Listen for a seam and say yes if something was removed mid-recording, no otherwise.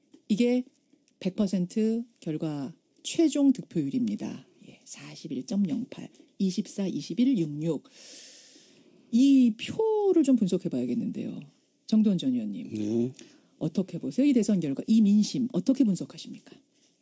yes